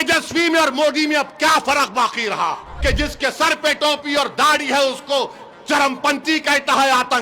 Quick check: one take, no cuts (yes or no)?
no